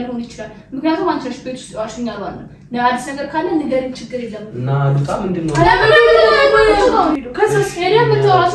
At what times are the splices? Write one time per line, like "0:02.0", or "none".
0:06.9